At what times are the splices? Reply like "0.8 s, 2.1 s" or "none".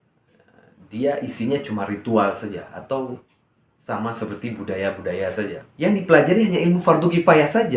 5.6 s